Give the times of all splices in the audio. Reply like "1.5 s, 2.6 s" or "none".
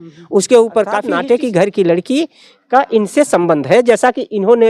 1.1 s